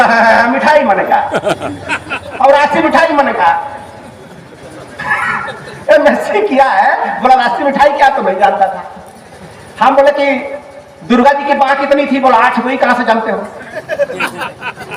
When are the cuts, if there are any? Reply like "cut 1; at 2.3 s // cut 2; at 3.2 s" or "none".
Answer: none